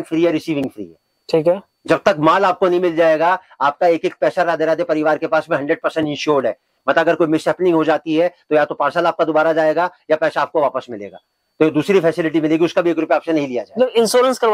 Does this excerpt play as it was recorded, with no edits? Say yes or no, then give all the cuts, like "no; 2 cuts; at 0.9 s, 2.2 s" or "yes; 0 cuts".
yes; 0 cuts